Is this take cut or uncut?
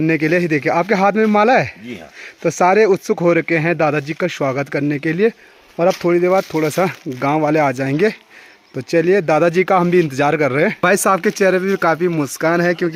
uncut